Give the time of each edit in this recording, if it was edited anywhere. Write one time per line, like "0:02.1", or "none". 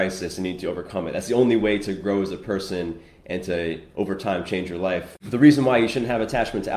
0:05.3